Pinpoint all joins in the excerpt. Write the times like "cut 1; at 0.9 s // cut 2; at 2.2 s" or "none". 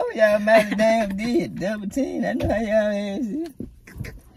none